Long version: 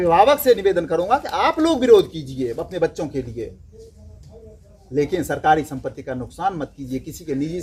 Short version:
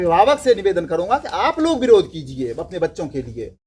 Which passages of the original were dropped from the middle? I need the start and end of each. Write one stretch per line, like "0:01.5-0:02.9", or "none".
none